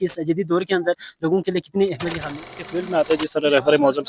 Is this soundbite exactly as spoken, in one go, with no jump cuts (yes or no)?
no